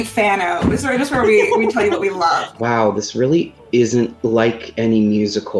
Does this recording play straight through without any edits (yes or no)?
no